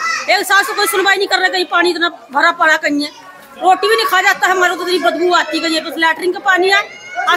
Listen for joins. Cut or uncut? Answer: uncut